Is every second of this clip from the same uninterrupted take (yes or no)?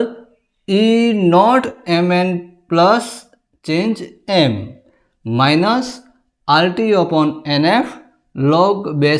yes